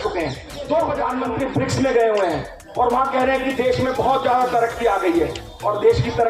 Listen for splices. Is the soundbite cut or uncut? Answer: cut